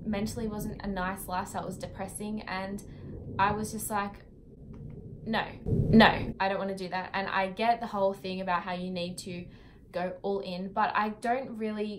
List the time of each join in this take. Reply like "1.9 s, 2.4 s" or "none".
none